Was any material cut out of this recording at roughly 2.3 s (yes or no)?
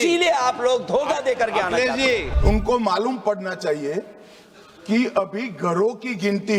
yes